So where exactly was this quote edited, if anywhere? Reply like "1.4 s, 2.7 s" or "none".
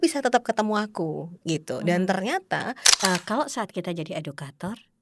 2.8 s